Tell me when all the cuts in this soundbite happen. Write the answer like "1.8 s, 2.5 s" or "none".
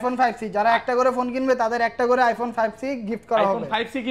none